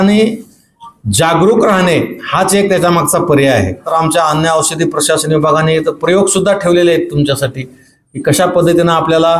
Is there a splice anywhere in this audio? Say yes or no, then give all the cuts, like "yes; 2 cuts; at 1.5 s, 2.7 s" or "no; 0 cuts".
yes; 1 cut; at 3.8 s